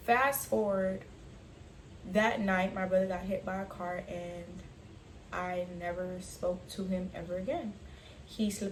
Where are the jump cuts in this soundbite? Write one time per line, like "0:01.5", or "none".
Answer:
none